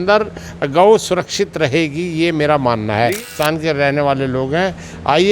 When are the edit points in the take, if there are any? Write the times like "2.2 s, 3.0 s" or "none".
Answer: 3.3 s